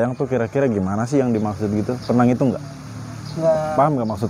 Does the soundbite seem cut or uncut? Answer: uncut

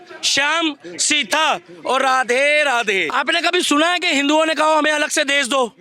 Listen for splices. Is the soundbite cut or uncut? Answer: cut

